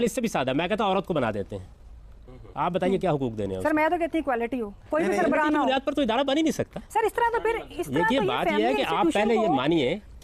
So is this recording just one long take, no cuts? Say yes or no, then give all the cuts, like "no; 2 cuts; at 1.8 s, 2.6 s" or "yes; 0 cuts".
yes; 0 cuts